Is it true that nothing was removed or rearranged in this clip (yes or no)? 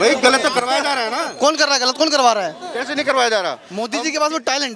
no